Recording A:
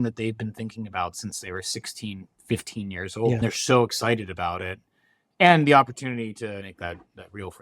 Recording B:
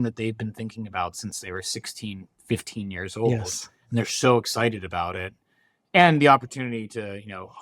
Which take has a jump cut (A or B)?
A